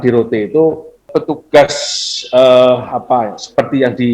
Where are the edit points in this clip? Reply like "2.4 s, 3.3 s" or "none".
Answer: 1.1 s